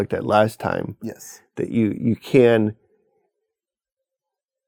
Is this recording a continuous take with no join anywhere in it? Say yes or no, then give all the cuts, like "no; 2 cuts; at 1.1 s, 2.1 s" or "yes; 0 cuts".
yes; 0 cuts